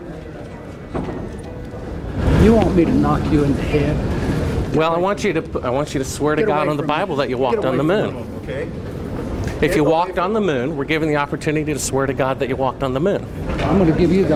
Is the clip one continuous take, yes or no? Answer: yes